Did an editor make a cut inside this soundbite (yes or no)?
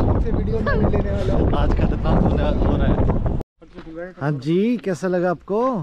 yes